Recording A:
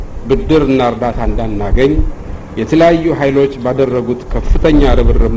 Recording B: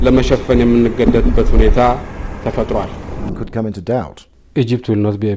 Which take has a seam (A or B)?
B